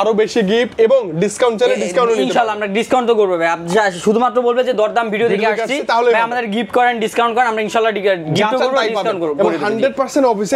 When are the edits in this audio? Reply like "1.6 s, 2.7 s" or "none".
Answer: none

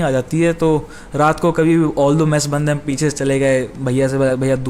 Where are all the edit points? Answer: none

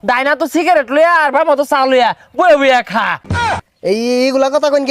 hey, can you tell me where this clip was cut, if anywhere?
3.5 s

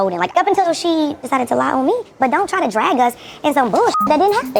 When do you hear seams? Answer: none

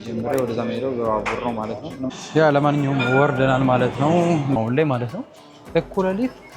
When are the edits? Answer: 2.1 s, 4.6 s

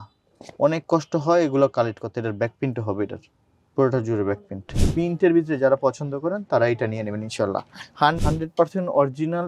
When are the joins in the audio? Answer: 4.8 s, 8.2 s

